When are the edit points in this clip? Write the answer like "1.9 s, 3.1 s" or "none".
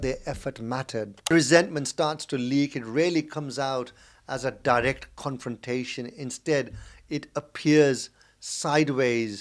1.3 s